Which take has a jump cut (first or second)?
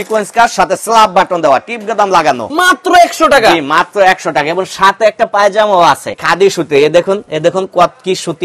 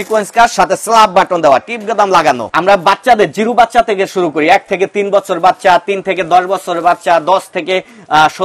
first